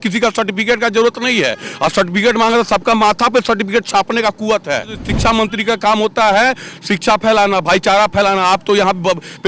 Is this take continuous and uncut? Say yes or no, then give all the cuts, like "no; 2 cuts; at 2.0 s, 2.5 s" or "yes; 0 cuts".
no; 1 cut; at 5.1 s